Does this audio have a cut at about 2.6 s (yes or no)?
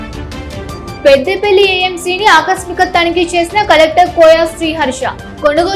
no